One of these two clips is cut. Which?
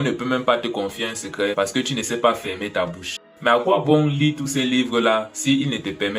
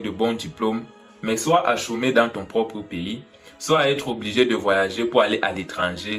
first; 1 cut; at 3.2 s

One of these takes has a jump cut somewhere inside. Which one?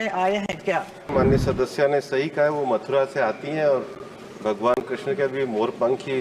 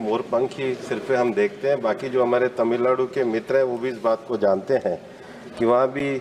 first; 1 cut; at 1.1 s

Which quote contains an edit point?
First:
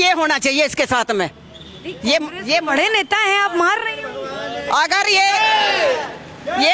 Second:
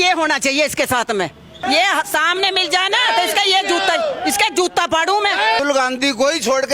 second; 2 cuts; at 1.5 s, 5.6 s

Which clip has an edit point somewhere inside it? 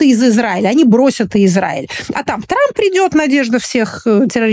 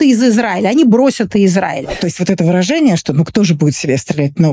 second; 1 cut; at 2.0 s

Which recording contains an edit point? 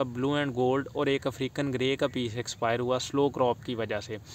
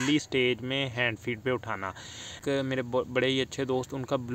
second; 1 cut; at 2.4 s

